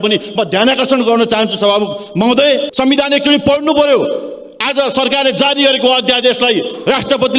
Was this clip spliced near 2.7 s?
yes; 1 cut; at 2.7 s

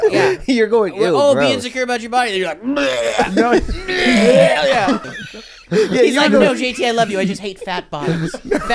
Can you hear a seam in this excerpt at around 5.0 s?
yes; 1 cut; at 5.0 s

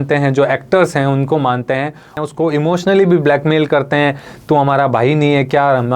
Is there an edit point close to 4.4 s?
no; 1 cut; at 2.1 s

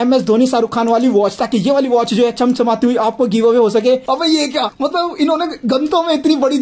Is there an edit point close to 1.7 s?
no; 1 cut; at 4.0 s

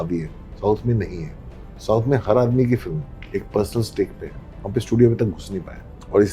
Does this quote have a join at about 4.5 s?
yes; 2 cuts; at 1.6 s, 4.5 s

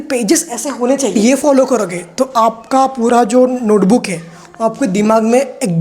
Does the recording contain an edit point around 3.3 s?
no; 1 cut; at 1.1 s

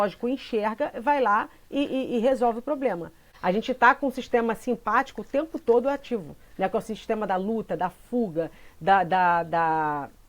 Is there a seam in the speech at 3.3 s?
yes; 1 cut; at 3.3 s

